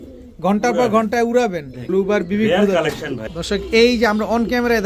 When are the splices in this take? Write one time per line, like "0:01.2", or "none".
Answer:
0:01.7
0:03.1